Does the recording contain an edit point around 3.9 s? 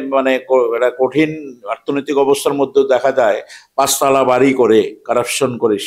no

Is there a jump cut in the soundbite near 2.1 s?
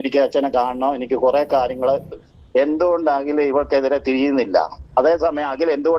yes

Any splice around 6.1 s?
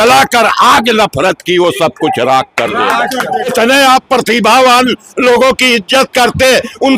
no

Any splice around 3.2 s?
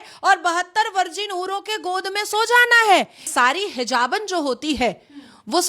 yes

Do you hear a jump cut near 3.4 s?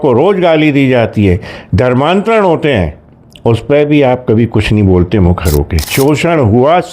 no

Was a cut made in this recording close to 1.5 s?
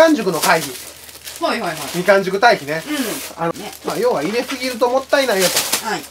no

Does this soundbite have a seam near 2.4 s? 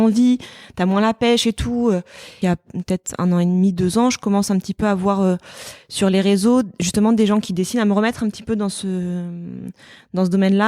yes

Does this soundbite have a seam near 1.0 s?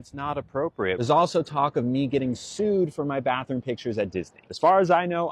yes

